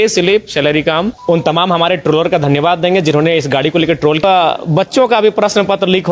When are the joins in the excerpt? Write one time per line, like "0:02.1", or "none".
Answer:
0:01.1
0:04.2

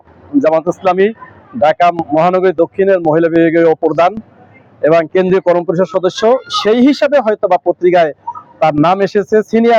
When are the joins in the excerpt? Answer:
none

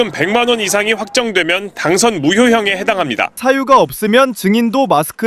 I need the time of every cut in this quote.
0:03.4

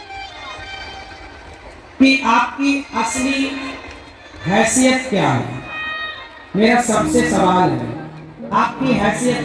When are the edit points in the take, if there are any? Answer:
none

